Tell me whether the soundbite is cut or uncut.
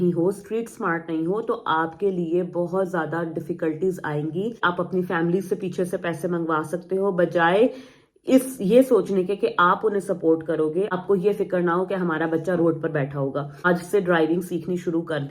cut